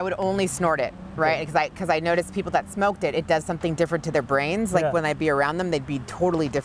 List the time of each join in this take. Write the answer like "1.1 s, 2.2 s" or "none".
none

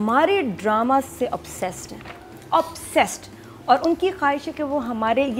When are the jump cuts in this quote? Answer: none

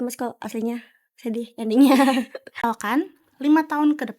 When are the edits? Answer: 2.6 s

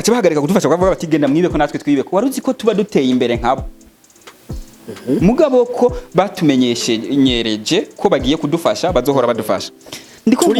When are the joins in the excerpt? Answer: none

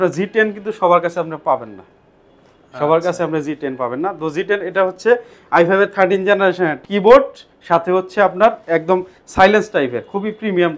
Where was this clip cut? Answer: 6.8 s

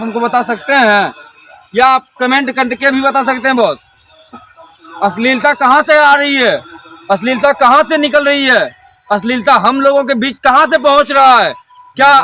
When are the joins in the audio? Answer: 4.4 s

